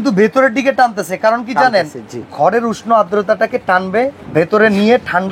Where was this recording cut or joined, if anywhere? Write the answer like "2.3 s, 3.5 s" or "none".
4.2 s